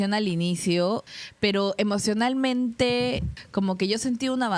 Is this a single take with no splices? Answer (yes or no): no